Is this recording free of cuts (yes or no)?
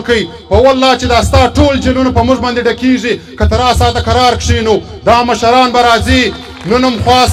yes